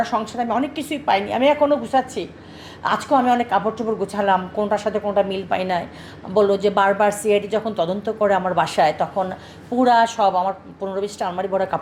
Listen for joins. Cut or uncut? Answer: uncut